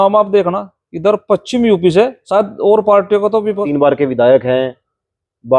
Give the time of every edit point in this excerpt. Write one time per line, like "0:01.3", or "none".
0:02.2
0:03.7